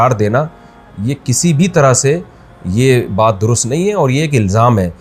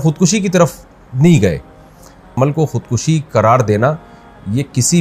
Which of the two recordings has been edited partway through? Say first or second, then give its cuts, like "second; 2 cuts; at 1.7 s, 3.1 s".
second; 1 cut; at 2.3 s